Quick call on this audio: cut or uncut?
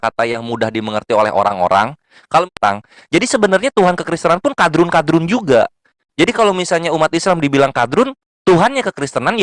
cut